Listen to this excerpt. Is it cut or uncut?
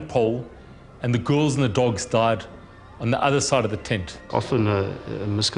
cut